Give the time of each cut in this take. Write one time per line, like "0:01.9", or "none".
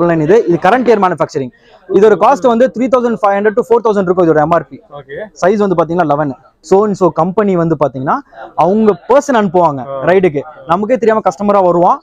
0:06.5